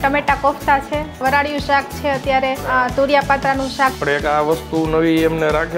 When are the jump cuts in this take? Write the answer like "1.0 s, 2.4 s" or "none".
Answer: 1.2 s, 2.6 s, 4.0 s